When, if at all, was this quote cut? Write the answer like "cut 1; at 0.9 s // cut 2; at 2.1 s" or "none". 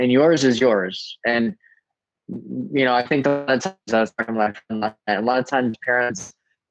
none